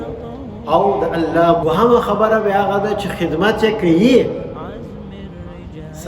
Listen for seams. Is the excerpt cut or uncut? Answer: cut